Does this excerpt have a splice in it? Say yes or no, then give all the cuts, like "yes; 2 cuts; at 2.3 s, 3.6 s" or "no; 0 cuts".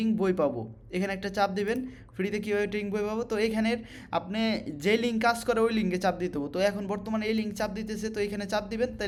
no; 0 cuts